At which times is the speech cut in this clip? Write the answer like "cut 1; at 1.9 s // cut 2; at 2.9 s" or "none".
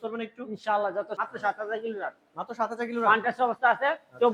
cut 1; at 1.1 s